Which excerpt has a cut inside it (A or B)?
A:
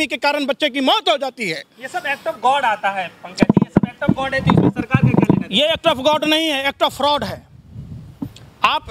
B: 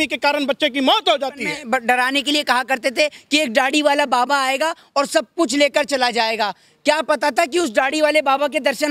B